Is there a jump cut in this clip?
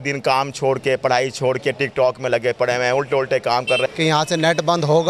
yes; 1 cut; at 3.8 s

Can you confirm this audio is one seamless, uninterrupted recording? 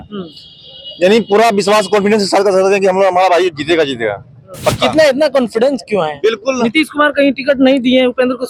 yes; 0 cuts

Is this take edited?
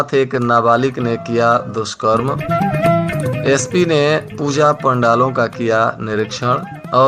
no; 0 cuts

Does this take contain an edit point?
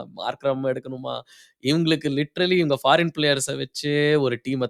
no; 0 cuts

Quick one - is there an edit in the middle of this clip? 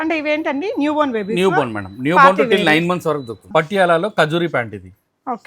yes; 1 cut; at 3.4 s

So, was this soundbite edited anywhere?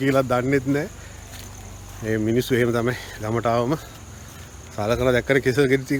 no; 0 cuts

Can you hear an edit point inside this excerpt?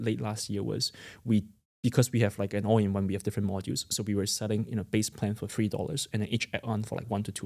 no; 0 cuts

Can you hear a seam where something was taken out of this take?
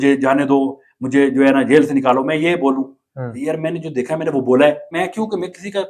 yes; 1 cut; at 4.9 s

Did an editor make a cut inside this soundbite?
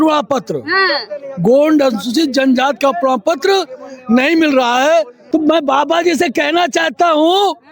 yes; 1 cut; at 5.2 s

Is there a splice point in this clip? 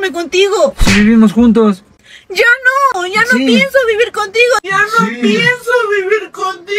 no; 0 cuts

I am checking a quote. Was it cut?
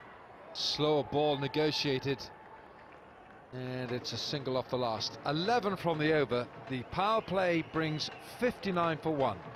no; 0 cuts

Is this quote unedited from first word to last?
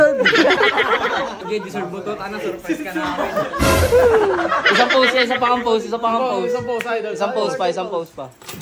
no; 1 cut; at 1.4 s

